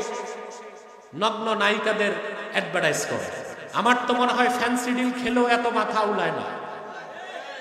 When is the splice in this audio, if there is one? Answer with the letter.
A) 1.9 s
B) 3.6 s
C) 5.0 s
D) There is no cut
B